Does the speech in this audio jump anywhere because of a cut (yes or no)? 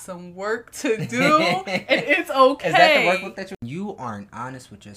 yes